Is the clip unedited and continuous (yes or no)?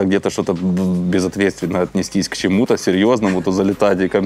yes